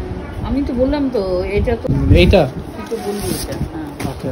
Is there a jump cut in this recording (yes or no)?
yes